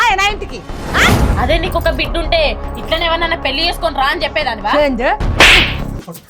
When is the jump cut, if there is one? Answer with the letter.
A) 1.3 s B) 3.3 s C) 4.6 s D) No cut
A